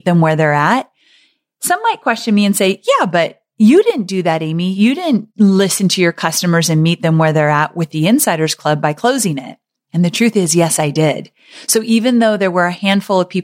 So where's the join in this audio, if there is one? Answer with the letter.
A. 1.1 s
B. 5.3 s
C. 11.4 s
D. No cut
B